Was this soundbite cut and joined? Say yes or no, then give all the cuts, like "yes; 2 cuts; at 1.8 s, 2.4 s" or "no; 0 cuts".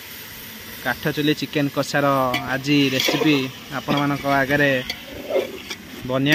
no; 0 cuts